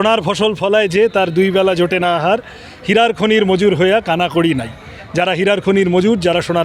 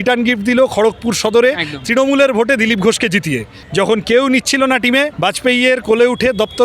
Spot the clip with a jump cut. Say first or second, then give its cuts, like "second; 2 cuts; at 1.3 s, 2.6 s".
second; 2 cuts; at 3.5 s, 5.1 s